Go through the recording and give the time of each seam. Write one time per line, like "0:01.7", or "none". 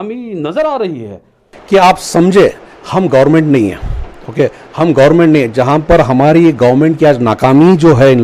0:01.5